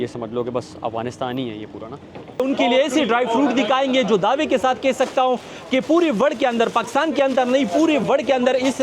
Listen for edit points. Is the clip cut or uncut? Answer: cut